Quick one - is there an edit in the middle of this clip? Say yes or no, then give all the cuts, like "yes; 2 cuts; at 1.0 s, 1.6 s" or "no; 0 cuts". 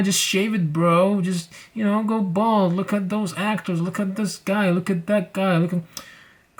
no; 0 cuts